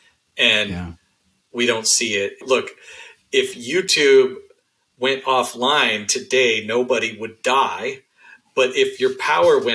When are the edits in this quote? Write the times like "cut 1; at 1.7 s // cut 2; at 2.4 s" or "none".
cut 1; at 2.4 s